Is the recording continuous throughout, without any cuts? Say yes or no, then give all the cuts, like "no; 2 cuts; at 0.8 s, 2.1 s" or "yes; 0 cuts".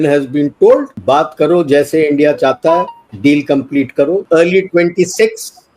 no; 3 cuts; at 0.9 s, 3.0 s, 4.2 s